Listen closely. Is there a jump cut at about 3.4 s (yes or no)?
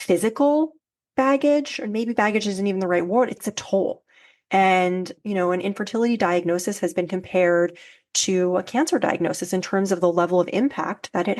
yes